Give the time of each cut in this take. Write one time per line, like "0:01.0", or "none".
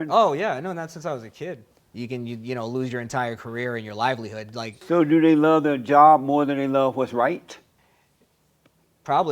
0:01.6
0:07.8